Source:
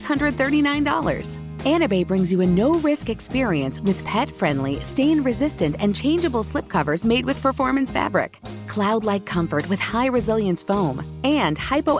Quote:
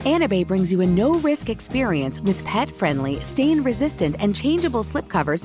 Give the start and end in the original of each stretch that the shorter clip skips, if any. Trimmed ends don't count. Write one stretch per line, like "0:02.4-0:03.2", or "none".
none